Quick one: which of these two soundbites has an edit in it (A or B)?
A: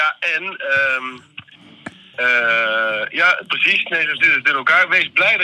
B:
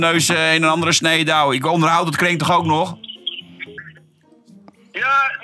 B